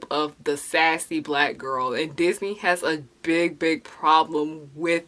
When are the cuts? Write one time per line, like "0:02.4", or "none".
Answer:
none